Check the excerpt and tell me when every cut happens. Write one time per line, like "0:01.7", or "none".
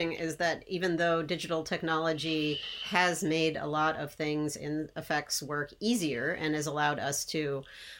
none